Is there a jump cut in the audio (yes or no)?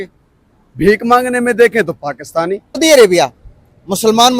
yes